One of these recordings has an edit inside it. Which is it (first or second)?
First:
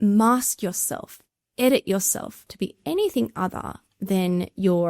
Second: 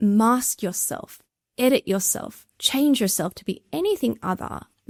first